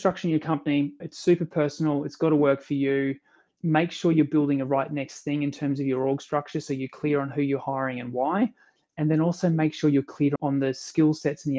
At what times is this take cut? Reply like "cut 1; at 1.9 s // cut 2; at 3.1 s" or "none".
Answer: cut 1; at 1.0 s // cut 2; at 10.4 s

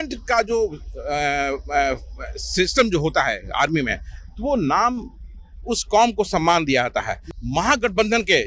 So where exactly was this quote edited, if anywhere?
cut 1; at 7.2 s

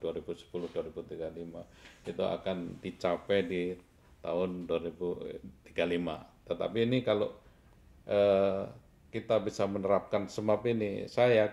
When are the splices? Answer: none

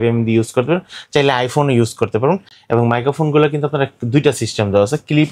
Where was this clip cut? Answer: none

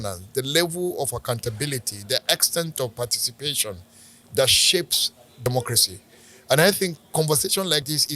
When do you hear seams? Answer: none

